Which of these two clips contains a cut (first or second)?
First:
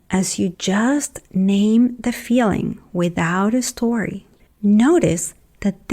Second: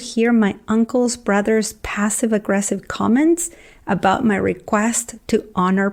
first